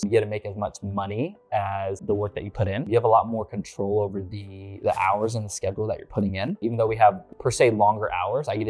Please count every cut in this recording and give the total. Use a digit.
1